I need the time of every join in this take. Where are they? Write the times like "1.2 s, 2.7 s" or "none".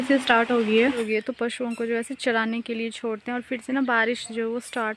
1.0 s